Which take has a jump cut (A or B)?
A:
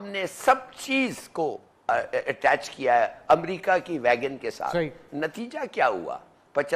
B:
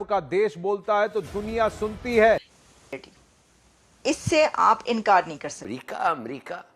B